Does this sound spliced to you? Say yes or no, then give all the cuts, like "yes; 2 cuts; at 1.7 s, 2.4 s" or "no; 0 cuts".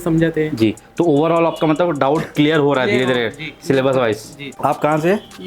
no; 0 cuts